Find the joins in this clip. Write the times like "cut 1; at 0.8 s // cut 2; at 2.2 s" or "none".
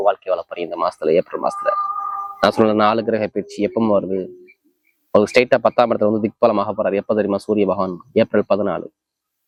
none